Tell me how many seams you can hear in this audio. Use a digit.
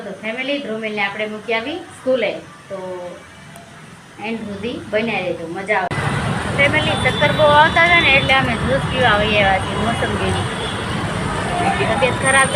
1